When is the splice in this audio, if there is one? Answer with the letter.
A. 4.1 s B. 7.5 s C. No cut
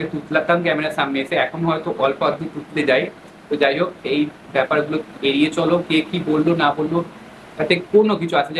C